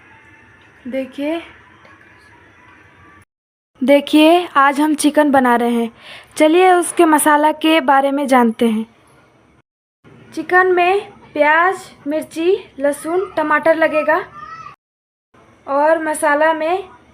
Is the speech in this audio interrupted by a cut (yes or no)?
yes